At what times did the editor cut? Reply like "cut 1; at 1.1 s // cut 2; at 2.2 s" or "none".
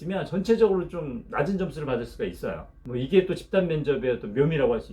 cut 1; at 2.7 s